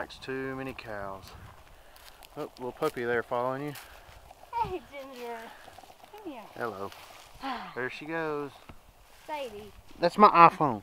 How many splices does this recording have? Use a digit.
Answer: 1